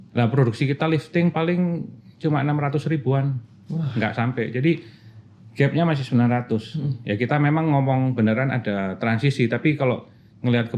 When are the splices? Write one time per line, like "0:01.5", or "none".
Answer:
none